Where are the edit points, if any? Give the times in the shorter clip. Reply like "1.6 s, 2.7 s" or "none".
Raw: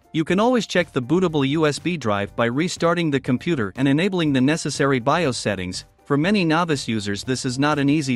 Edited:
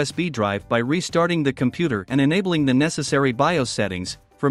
none

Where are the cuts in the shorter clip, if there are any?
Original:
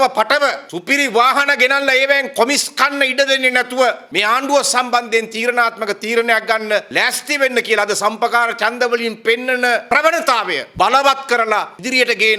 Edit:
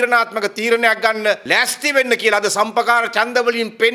none

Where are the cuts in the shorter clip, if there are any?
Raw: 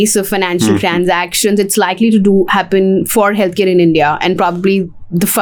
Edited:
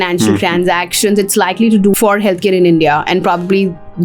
1.9 s

